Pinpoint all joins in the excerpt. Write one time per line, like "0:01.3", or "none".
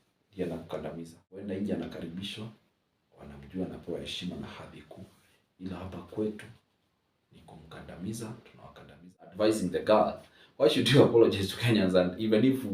0:01.4
0:09.1